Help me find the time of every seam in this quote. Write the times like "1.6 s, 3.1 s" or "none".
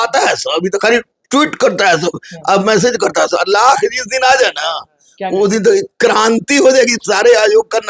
none